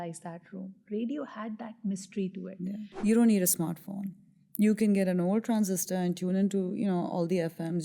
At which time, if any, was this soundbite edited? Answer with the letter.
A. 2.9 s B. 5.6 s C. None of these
A